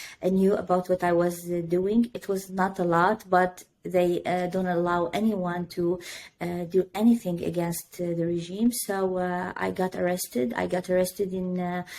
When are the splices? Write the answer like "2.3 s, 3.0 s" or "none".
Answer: none